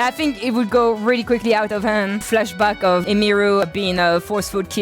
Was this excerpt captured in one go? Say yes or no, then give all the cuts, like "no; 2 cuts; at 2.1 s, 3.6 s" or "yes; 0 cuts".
no; 2 cuts; at 2.2 s, 3.6 s